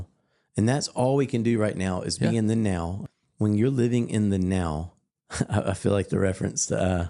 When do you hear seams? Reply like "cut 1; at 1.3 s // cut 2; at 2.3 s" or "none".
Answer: cut 1; at 3.0 s